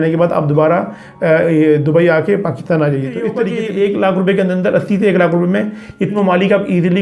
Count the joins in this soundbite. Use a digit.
2